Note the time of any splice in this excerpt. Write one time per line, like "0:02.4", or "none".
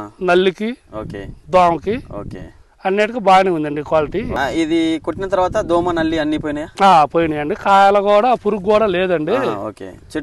0:04.3